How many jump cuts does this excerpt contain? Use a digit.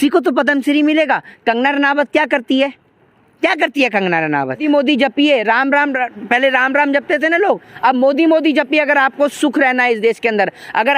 1